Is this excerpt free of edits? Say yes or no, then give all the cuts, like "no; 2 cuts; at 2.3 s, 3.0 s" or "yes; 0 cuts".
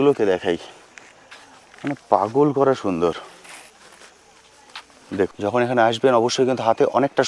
no; 1 cut; at 5.3 s